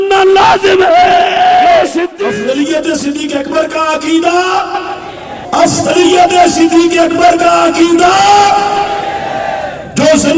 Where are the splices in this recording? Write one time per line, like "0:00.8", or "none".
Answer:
0:02.2